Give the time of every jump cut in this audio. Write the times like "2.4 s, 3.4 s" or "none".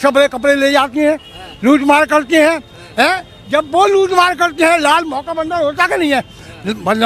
none